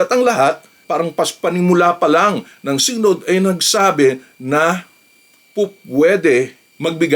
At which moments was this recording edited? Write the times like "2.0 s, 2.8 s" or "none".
none